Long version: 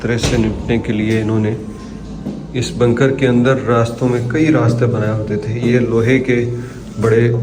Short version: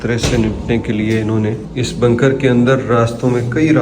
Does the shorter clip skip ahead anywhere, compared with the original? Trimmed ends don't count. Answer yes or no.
yes